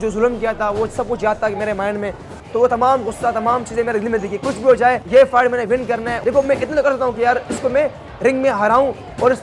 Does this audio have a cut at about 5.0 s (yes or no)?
yes